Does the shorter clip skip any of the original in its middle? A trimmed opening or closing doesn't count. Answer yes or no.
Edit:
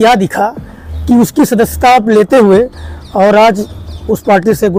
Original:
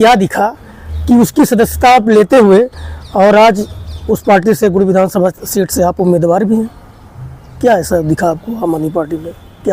no